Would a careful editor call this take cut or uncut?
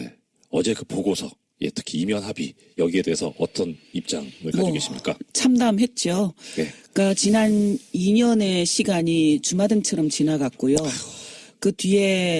uncut